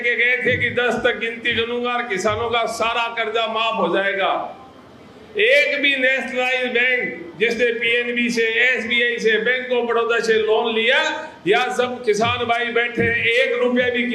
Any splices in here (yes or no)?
no